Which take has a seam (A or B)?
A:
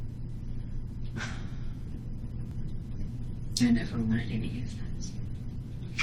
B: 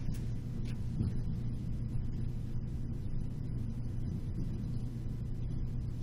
A